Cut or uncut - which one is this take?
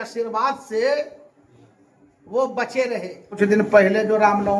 cut